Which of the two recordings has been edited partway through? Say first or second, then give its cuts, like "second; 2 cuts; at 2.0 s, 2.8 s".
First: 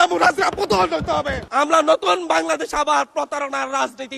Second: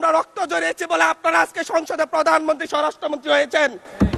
first; 1 cut; at 1.5 s